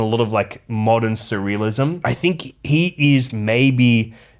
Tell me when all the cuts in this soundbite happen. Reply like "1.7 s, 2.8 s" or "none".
2.0 s